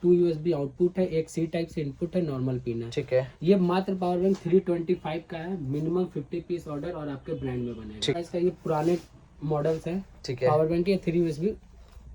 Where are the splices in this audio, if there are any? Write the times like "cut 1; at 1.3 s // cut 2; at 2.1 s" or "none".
cut 1; at 8.2 s

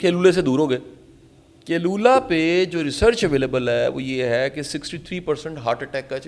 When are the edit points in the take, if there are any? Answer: none

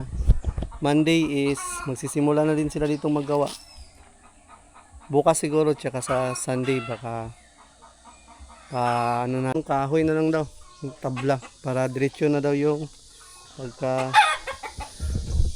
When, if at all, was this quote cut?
cut 1; at 9.5 s

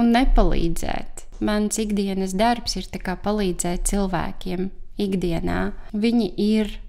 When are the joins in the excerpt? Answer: cut 1; at 1.3 s // cut 2; at 5.8 s

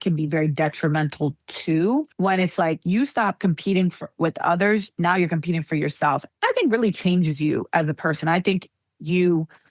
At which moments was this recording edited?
cut 1; at 2.1 s // cut 2; at 6.2 s

